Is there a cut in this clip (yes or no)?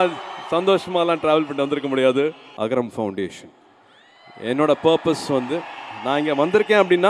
yes